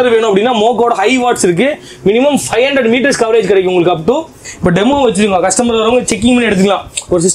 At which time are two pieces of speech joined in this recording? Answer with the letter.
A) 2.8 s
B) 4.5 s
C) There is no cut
B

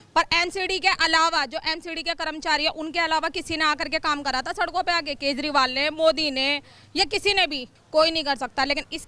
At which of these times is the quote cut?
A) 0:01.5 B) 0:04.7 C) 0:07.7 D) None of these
C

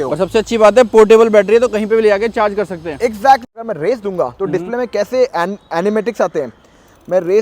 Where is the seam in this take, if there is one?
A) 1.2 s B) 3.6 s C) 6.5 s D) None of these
B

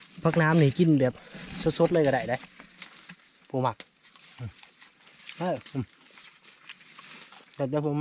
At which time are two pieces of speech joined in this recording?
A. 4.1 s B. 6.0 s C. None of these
C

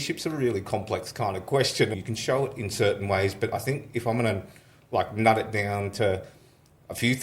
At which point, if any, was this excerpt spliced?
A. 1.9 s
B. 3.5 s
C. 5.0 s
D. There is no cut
A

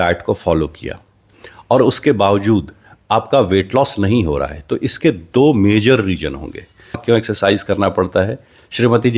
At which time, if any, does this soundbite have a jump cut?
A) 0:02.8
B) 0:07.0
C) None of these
B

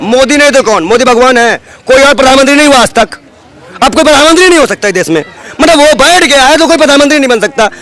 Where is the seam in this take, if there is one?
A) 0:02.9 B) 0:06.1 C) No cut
C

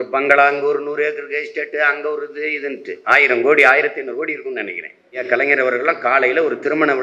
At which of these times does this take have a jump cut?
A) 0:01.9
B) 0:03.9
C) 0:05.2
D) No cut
C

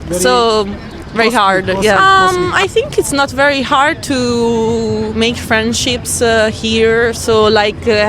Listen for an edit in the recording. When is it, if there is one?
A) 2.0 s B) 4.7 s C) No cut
A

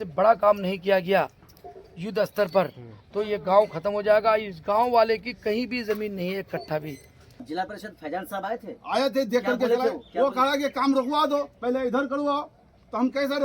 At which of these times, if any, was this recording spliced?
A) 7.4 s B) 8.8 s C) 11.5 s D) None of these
A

